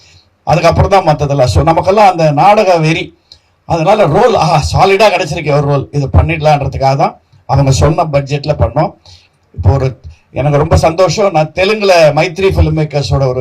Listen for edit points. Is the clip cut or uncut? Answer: cut